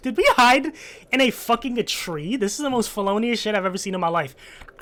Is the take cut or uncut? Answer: uncut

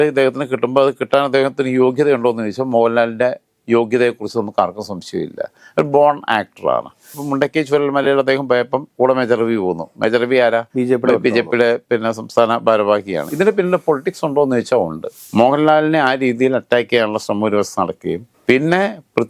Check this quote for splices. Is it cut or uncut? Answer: cut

